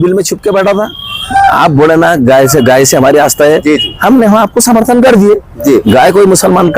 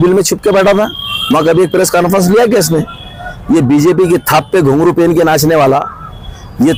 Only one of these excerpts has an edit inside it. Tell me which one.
first; 1 cut; at 1.1 s

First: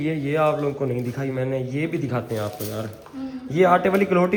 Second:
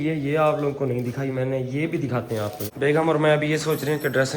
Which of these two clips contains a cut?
second; 1 cut; at 2.6 s

